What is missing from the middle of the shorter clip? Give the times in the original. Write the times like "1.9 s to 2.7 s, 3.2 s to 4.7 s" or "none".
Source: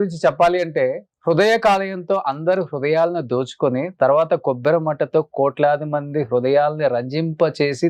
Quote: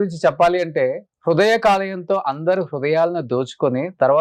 none